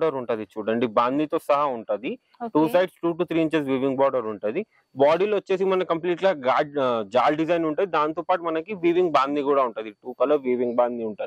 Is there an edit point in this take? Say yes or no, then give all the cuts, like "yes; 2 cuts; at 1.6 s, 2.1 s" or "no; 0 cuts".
no; 0 cuts